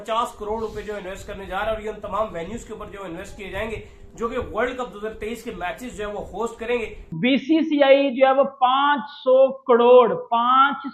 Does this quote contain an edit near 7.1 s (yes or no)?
yes